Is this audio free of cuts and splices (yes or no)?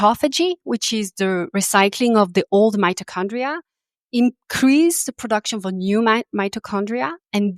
yes